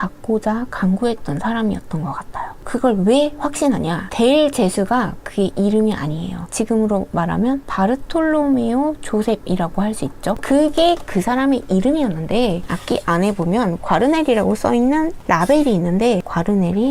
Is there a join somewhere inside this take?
no; 0 cuts

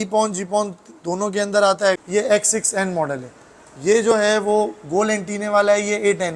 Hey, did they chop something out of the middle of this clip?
yes; 1 cut; at 2.0 s

